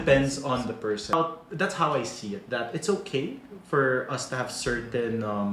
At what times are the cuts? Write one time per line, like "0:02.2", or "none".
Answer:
0:01.1